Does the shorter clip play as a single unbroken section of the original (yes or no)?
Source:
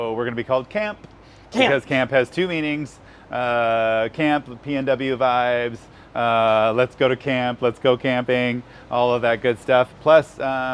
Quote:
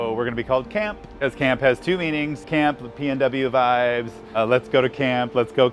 no